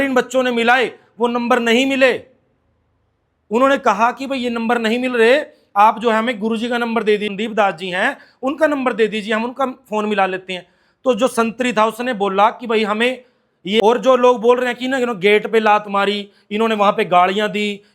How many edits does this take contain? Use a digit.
1